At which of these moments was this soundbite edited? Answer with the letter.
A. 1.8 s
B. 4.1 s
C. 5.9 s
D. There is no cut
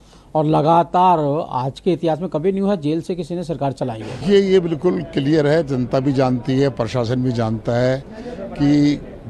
B